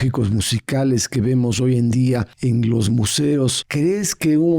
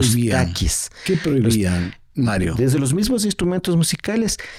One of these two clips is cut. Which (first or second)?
first